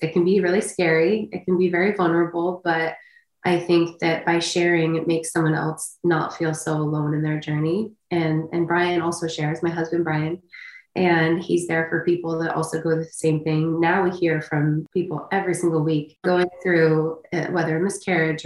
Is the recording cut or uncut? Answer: cut